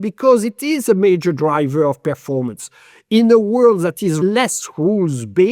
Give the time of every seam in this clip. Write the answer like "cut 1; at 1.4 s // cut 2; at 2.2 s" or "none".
cut 1; at 4.2 s